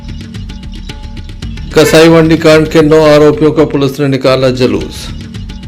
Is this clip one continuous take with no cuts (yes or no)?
no